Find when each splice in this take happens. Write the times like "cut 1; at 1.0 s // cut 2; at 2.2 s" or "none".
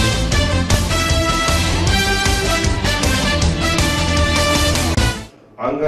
cut 1; at 1.4 s